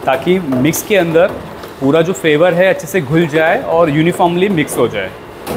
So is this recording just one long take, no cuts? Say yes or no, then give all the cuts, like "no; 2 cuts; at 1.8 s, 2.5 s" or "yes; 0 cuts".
yes; 0 cuts